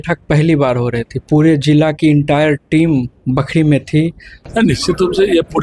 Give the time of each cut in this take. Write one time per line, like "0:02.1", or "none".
0:04.4